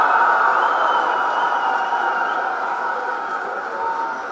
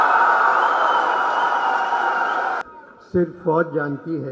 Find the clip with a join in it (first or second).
second